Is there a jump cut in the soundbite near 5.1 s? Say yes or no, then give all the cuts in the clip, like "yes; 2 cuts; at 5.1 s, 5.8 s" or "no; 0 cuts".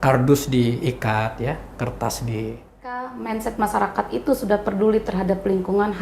no; 1 cut; at 3.1 s